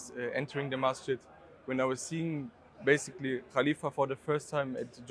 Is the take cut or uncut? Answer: uncut